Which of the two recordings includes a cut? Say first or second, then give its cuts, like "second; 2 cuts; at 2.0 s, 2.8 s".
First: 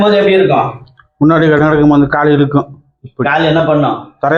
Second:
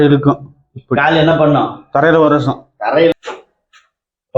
second; 1 cut; at 3.1 s